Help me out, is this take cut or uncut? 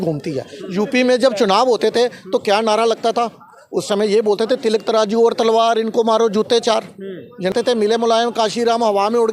cut